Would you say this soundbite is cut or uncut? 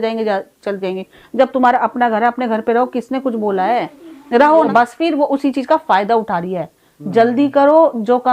cut